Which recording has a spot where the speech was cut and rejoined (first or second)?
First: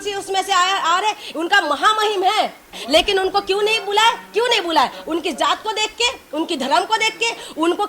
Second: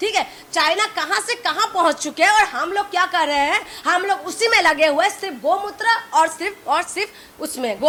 first